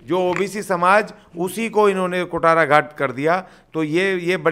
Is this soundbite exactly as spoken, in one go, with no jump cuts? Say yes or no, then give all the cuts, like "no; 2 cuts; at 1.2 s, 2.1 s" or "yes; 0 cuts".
yes; 0 cuts